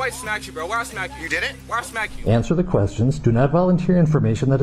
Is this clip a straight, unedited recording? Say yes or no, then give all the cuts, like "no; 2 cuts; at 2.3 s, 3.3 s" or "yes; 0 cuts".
no; 1 cut; at 2.1 s